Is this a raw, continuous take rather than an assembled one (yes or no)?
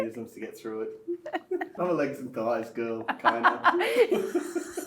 no